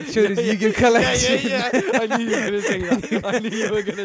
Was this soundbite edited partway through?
no; 0 cuts

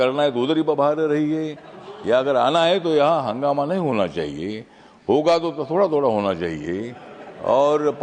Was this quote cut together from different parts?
no; 0 cuts

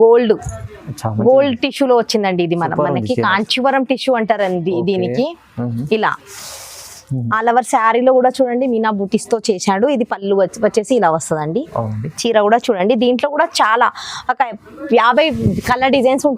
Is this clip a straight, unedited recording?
yes; 0 cuts

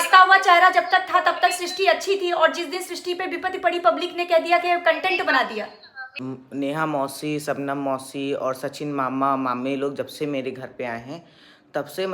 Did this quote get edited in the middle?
yes; 1 cut; at 6.2 s

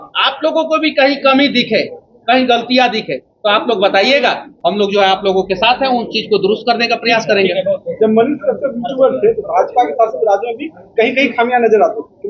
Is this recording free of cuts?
yes; 0 cuts

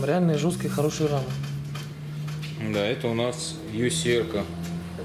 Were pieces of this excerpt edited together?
no; 0 cuts

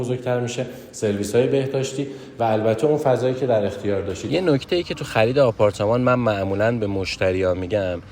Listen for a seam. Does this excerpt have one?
yes; 1 cut; at 4.2 s

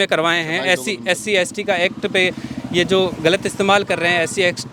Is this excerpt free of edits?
yes; 0 cuts

